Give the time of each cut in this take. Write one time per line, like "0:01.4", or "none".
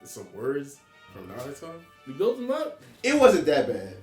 0:01.9